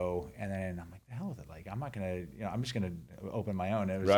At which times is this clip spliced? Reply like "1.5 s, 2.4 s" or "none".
none